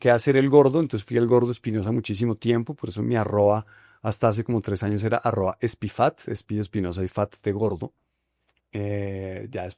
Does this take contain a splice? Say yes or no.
no